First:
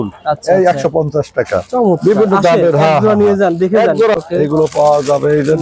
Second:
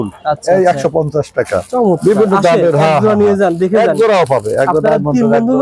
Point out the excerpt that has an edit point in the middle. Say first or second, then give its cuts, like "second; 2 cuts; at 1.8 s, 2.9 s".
first; 1 cut; at 4.1 s